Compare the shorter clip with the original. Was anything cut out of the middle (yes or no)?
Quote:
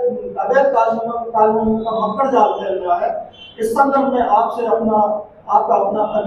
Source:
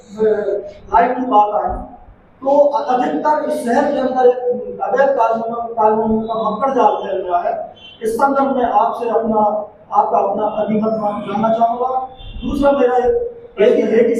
no